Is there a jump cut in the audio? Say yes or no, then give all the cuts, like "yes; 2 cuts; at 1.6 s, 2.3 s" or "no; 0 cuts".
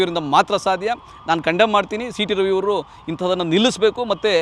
no; 0 cuts